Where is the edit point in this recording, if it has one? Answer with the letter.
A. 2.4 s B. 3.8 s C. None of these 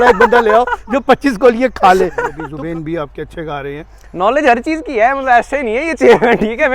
A